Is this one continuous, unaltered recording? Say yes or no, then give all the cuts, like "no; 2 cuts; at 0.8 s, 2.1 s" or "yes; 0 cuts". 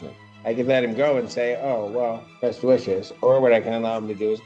no; 1 cut; at 2.3 s